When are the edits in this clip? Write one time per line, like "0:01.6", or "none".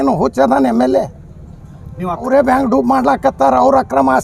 0:02.3